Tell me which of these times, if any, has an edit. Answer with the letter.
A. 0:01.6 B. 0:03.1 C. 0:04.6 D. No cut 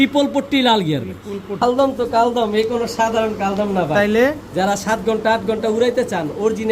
A